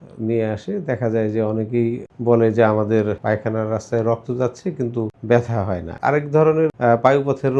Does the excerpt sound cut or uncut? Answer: cut